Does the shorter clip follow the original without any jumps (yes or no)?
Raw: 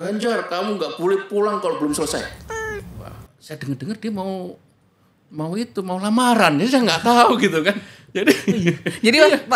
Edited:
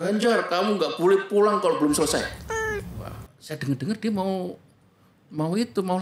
yes